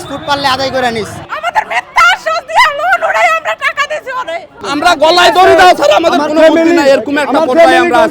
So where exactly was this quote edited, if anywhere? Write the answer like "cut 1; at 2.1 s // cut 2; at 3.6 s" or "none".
cut 1; at 1.2 s // cut 2; at 4.6 s